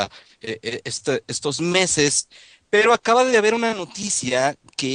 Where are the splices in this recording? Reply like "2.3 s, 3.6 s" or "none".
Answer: 3.1 s